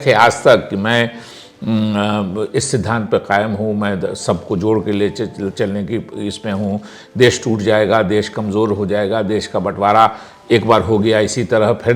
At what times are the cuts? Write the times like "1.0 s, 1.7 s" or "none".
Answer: none